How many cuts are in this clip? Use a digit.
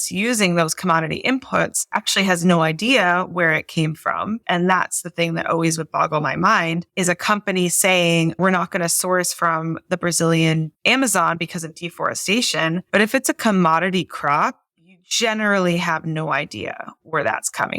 2